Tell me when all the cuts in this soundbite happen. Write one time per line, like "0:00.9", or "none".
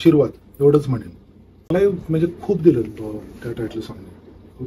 0:01.7